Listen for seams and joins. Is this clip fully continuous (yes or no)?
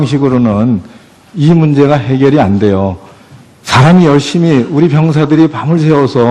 no